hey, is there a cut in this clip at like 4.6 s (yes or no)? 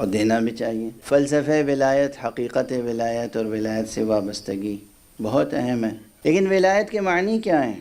no